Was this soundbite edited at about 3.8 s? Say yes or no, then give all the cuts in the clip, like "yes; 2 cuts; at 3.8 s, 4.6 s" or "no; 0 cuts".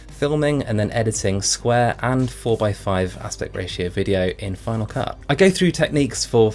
no; 1 cut; at 5.2 s